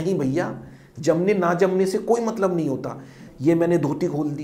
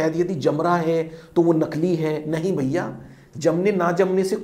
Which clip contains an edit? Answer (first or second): first